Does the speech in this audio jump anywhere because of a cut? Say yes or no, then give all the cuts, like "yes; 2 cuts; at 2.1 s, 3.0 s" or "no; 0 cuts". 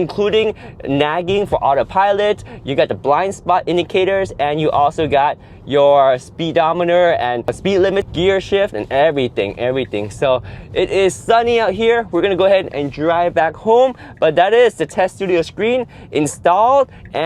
yes; 1 cut; at 7.8 s